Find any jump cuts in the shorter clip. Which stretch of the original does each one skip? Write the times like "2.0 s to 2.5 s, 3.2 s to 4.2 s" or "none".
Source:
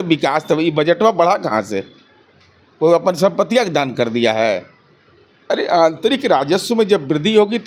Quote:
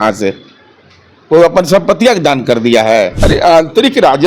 4.7 s to 5.4 s